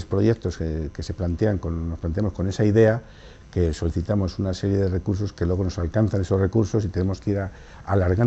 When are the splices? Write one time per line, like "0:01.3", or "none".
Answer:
0:05.5